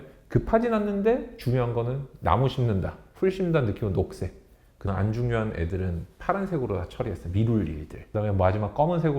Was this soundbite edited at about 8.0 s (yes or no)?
yes